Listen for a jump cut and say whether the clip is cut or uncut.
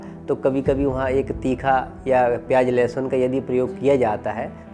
uncut